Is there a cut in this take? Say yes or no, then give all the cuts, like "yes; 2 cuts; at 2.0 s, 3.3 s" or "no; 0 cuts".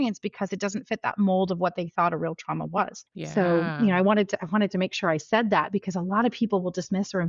yes; 1 cut; at 3.0 s